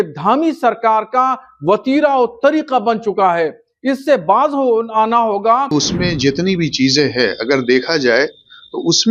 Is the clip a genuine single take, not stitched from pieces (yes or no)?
no